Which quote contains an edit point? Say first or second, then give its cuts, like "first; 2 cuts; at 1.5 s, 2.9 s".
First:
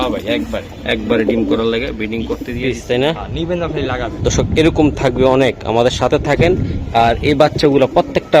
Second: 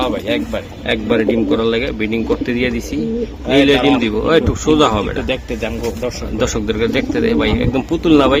first; 1 cut; at 2.5 s